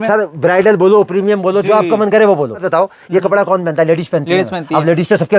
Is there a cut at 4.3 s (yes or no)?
no